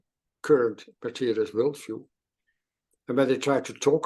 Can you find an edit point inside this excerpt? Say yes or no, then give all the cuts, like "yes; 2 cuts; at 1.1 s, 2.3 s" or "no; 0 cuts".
no; 0 cuts